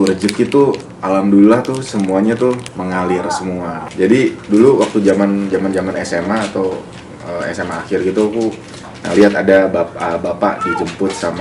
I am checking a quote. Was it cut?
yes; 2 cuts; at 2.7 s, 3.8 s

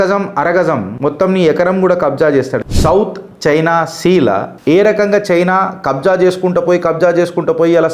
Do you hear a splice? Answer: yes; 2 cuts; at 0.9 s, 2.6 s

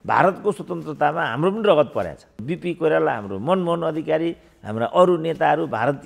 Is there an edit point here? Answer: yes; 1 cut; at 2.4 s

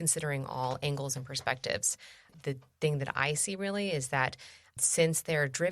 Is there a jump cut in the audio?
yes; 1 cut; at 2.3 s

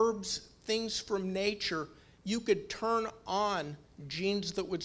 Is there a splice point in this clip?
no; 0 cuts

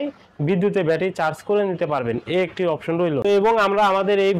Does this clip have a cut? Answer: yes; 1 cut; at 3.2 s

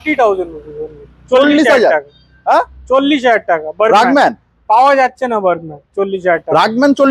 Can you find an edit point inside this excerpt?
no; 0 cuts

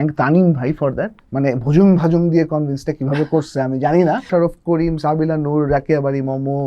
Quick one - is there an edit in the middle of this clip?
yes; 2 cuts; at 1.1 s, 4.3 s

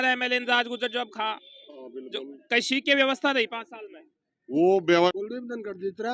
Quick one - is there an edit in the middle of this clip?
yes; 1 cut; at 5.1 s

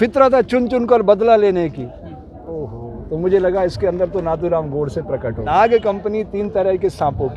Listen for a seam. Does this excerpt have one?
yes; 1 cut; at 5.5 s

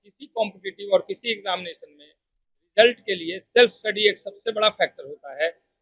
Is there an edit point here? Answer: no; 0 cuts

